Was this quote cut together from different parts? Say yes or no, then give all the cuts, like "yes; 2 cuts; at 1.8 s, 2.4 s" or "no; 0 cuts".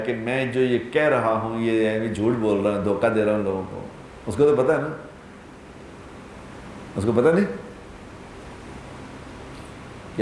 no; 0 cuts